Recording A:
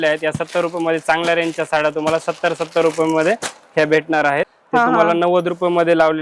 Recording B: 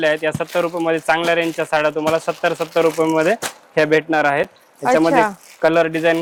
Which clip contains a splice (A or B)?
A